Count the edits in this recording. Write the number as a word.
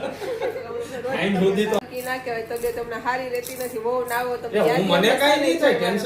one